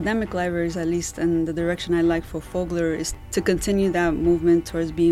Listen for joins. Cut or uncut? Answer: cut